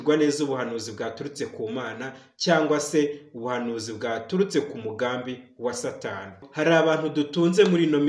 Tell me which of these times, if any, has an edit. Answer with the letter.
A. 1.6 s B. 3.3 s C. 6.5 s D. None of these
C